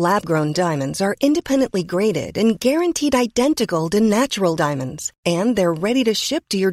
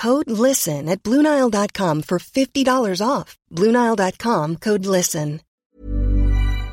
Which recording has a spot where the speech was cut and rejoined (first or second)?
second